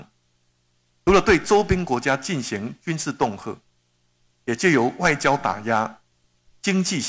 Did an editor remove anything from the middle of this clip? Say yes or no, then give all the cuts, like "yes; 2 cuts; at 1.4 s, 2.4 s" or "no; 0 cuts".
no; 0 cuts